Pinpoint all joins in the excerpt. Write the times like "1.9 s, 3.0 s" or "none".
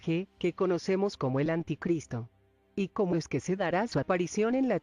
1.3 s